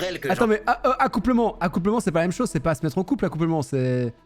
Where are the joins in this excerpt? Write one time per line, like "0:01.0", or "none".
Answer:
none